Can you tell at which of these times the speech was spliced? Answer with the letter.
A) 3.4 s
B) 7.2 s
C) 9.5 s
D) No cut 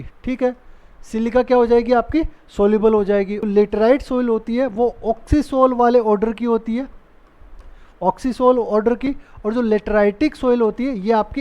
A